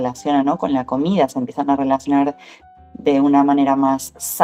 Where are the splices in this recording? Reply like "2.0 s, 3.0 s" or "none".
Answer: none